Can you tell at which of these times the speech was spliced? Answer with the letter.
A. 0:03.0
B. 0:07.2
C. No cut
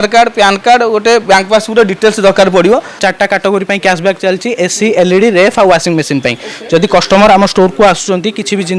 A